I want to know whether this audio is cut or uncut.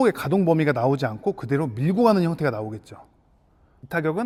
uncut